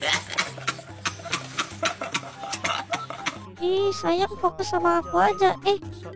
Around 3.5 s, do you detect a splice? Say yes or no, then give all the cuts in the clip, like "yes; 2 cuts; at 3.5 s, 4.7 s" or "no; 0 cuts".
yes; 1 cut; at 3.5 s